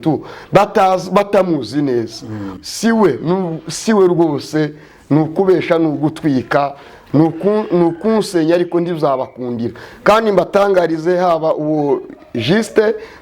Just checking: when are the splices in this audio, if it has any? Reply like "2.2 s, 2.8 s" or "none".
2.4 s